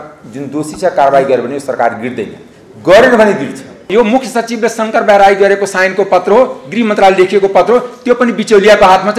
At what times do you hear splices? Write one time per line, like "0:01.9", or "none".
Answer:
0:03.9